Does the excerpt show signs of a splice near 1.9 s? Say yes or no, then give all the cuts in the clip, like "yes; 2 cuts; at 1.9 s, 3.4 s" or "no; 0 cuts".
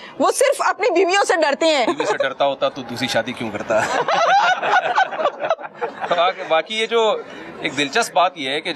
yes; 1 cut; at 1.9 s